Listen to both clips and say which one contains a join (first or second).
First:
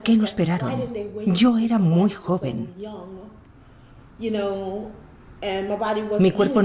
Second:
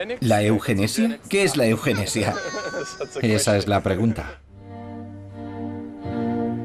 first